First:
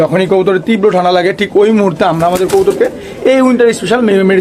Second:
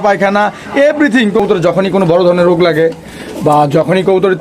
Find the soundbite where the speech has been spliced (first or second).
second